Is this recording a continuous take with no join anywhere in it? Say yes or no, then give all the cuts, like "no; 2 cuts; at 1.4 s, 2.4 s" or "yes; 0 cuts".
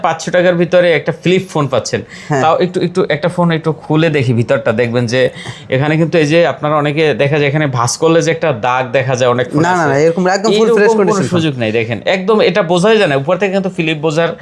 yes; 0 cuts